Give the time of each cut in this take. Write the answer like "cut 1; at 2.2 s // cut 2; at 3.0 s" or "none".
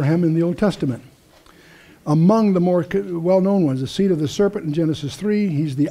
cut 1; at 3.6 s